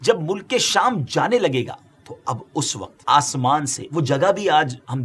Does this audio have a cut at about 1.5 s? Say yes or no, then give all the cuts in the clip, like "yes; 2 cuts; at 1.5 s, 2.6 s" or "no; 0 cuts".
no; 1 cut; at 3.0 s